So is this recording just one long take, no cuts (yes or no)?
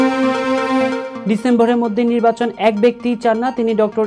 no